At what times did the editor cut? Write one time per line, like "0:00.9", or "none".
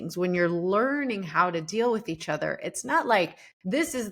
none

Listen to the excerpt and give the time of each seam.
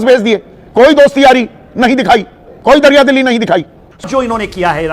0:04.0

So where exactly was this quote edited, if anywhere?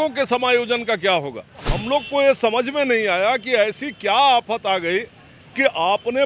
0:01.8

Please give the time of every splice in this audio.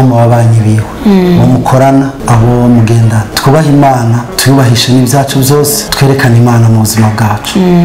0:00.9
0:02.2
0:03.3
0:04.3
0:05.9

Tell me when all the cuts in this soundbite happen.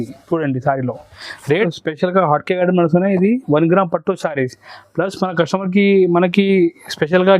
0:01.6

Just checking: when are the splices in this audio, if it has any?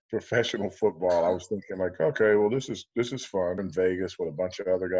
0:03.7

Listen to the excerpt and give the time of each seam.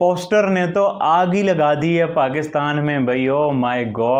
none

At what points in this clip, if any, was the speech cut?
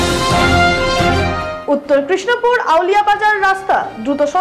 0:01.3

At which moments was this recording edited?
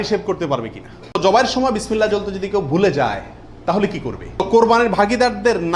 0:01.2
0:04.4

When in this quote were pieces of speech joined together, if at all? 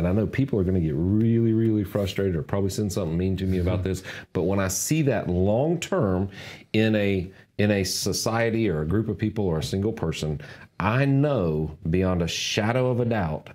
none

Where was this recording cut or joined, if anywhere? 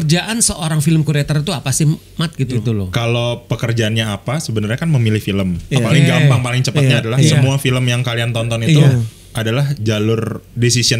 0:02.6

